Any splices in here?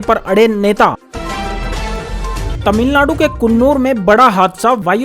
yes; 1 cut; at 1.0 s

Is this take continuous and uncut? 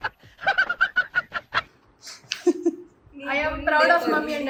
yes; 0 cuts

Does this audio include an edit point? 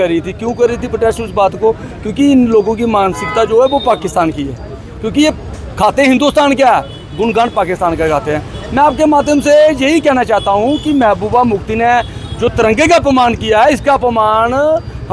no; 0 cuts

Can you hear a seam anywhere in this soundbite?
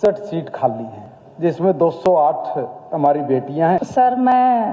yes; 1 cut; at 3.8 s

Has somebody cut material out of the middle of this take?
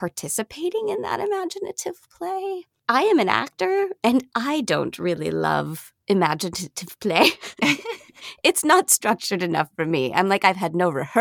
yes; 1 cut; at 2.7 s

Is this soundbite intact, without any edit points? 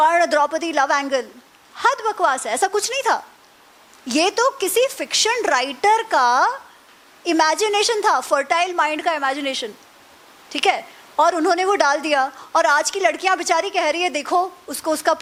yes; 0 cuts

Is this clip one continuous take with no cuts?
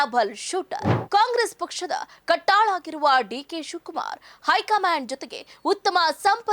no; 1 cut; at 0.9 s

